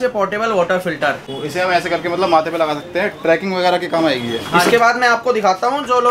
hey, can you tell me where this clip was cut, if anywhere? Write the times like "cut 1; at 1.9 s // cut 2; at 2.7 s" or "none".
cut 1; at 1.3 s // cut 2; at 4.7 s